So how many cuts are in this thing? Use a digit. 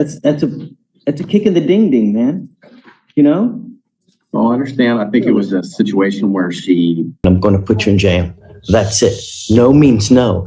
1